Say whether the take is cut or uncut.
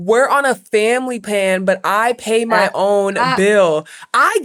uncut